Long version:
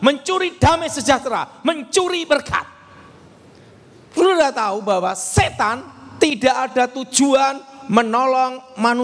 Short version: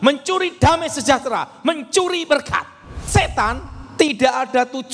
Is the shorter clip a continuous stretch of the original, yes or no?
no